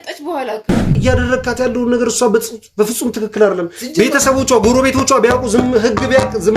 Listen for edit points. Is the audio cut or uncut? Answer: cut